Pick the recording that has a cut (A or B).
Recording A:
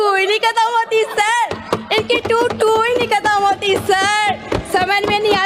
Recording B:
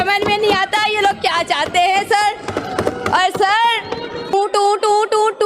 B